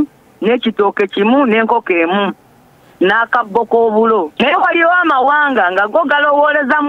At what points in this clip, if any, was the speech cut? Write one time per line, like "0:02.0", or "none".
0:04.3